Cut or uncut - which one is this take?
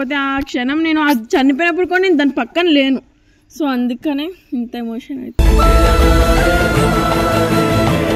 uncut